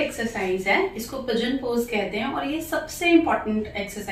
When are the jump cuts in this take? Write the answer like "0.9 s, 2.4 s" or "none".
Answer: none

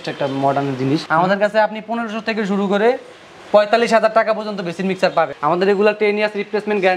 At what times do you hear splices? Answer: 1.1 s, 5.3 s

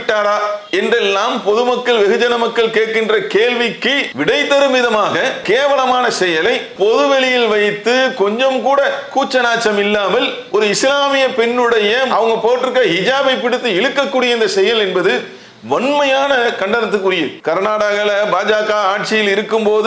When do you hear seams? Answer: 4.1 s, 15.3 s, 17.3 s

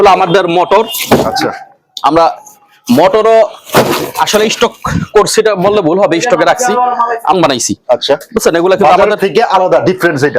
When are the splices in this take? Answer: 7.3 s

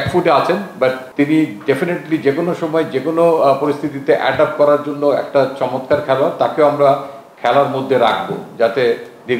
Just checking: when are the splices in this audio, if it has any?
1.0 s

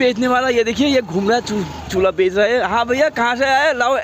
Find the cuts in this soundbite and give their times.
none

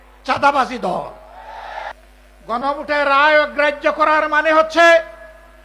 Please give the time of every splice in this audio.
1.9 s

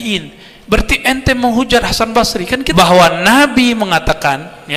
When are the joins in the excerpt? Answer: 2.7 s

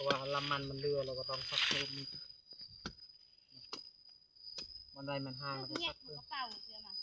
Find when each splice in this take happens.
none

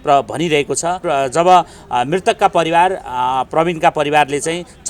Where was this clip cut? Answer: 1.0 s

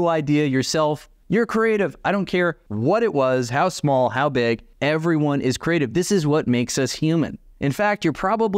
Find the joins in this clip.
1.1 s, 2.7 s, 4.7 s

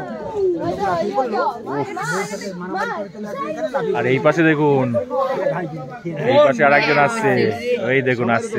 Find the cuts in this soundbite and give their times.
none

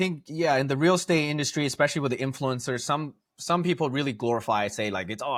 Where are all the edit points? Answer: none

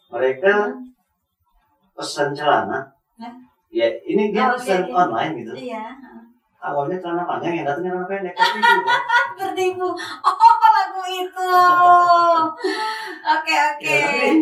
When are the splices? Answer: none

